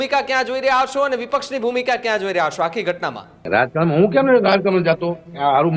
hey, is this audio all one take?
no; 1 cut; at 3.4 s

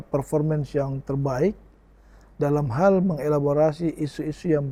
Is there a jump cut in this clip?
no; 0 cuts

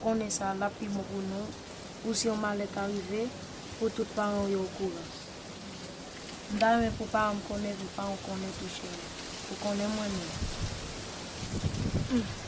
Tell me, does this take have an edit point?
no; 0 cuts

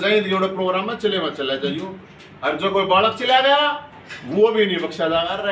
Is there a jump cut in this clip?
no; 0 cuts

